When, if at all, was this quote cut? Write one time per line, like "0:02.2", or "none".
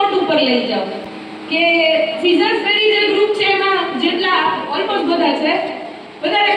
none